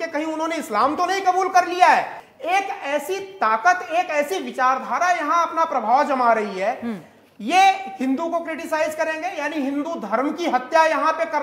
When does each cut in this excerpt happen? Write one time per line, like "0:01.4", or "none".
0:02.2